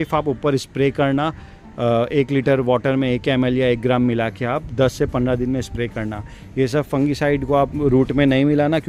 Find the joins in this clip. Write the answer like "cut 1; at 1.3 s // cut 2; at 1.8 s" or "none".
none